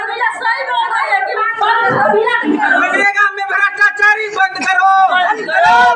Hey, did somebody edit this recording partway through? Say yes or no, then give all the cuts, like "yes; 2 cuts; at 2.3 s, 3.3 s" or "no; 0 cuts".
yes; 1 cut; at 2.4 s